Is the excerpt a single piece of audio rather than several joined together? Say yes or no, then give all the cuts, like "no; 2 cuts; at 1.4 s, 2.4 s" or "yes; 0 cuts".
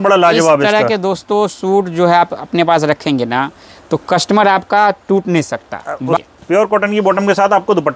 no; 1 cut; at 6.2 s